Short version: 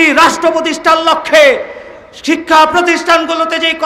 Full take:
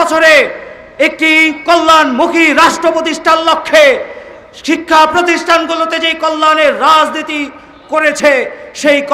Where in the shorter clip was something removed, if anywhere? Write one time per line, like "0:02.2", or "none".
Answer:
none